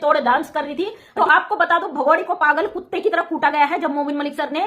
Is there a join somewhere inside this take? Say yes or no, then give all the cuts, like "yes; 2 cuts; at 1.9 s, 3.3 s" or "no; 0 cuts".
yes; 1 cut; at 1.0 s